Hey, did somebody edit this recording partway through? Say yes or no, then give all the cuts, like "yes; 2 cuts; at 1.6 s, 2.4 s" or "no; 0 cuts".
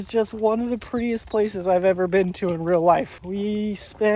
yes; 1 cut; at 3.2 s